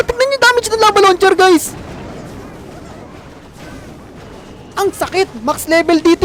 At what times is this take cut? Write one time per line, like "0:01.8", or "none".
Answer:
none